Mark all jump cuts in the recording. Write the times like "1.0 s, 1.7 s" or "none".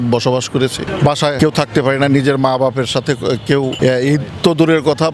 1.2 s, 3.7 s